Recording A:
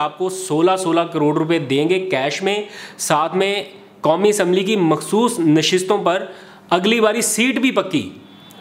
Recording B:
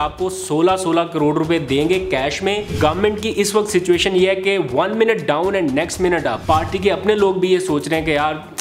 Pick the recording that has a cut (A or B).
B